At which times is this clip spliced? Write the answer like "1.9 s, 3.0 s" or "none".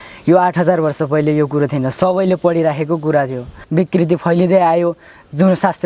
3.5 s